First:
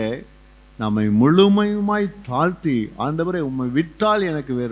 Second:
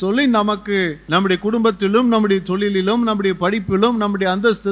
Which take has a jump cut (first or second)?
second